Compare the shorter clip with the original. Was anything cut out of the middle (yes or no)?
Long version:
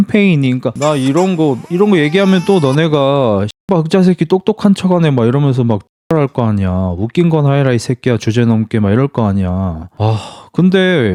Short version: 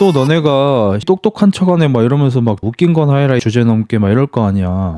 yes